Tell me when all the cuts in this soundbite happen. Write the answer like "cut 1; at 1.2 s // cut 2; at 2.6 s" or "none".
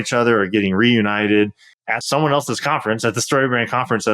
cut 1; at 1.9 s